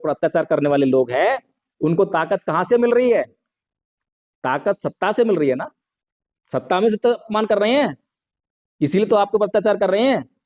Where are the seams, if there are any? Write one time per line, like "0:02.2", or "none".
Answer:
0:07.2